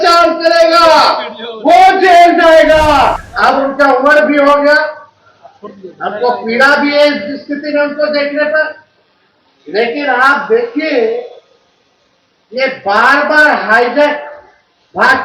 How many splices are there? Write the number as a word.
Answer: one